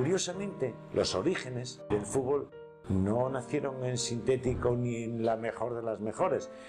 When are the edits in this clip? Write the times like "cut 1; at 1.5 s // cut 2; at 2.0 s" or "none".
cut 1; at 1.9 s